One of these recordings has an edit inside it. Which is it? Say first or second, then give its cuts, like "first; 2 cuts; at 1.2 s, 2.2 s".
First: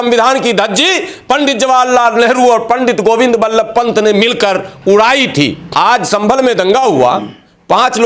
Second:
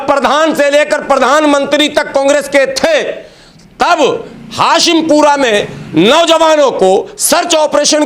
first; 1 cut; at 5.6 s